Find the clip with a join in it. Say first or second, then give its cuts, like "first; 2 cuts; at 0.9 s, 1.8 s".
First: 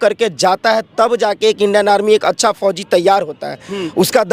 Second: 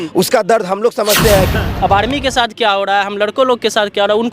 second; 1 cut; at 1.6 s